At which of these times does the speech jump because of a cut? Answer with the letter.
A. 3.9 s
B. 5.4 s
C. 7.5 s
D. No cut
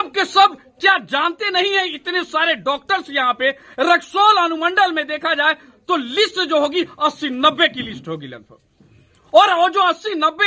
D